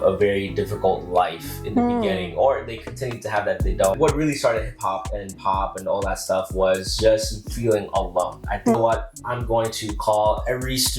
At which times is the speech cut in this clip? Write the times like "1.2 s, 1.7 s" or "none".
4.0 s, 8.8 s

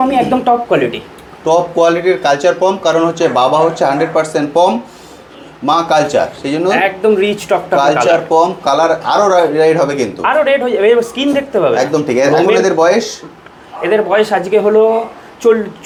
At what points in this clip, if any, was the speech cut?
none

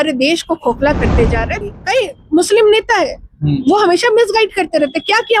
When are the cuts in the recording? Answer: 1.6 s

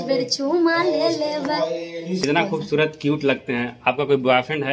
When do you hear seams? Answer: 2.2 s

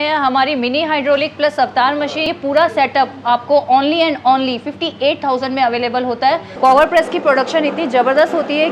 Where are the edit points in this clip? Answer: 2.2 s, 6.5 s

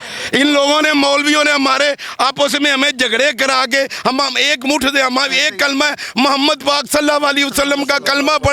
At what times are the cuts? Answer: none

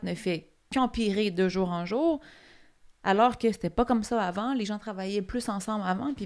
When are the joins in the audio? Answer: none

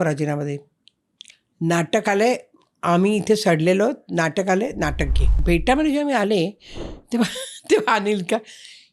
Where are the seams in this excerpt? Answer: 5.3 s

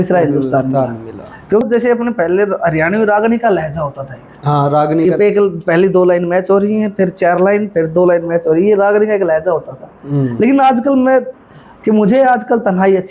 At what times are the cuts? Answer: 1.6 s, 11.4 s

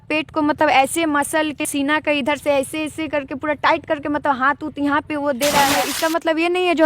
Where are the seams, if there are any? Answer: 1.6 s, 5.9 s

